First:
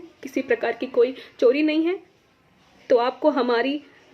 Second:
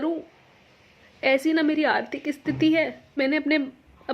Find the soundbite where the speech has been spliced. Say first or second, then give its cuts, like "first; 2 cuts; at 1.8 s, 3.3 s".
second; 1 cut; at 3.2 s